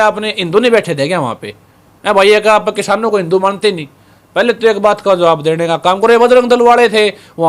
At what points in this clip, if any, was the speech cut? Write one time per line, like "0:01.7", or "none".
none